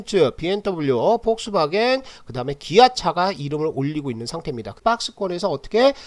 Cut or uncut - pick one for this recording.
cut